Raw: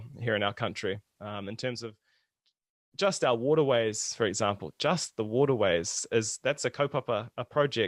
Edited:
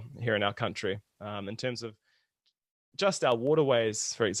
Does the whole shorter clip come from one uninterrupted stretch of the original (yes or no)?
yes